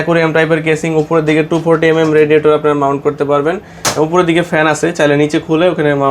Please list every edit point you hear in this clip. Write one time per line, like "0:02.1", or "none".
none